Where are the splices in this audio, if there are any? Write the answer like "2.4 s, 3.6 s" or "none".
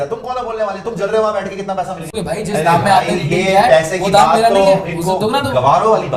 2.0 s